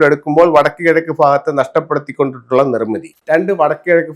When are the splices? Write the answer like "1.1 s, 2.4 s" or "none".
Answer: 3.1 s

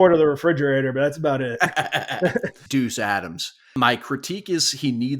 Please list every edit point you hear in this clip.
2.6 s

